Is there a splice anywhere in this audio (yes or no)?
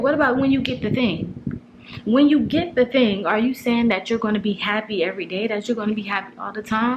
no